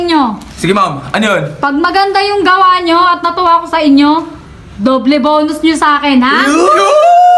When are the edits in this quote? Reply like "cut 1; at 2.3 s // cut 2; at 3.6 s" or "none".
none